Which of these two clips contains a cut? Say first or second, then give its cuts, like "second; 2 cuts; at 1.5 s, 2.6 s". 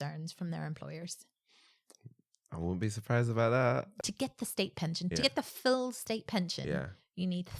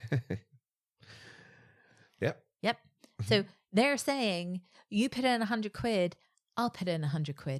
first; 1 cut; at 3.9 s